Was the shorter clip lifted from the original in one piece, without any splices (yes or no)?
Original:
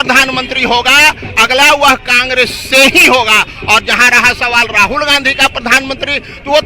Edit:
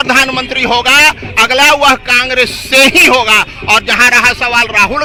yes